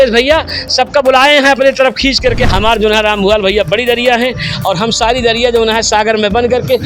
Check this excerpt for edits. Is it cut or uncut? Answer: cut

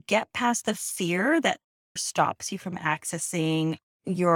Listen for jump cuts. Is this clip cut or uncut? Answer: cut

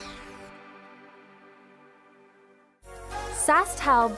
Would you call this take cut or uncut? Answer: cut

